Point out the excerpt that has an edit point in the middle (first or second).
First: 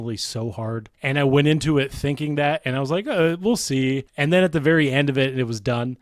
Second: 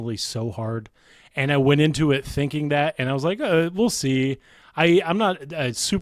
first